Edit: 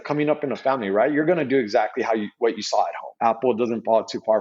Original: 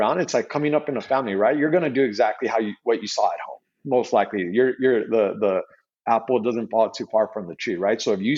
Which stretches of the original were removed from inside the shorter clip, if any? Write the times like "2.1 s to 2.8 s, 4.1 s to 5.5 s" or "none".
3.5 s to 5.9 s